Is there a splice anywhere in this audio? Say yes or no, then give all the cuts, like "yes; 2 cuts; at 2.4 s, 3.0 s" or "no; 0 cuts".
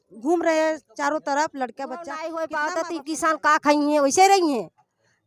yes; 1 cut; at 2.2 s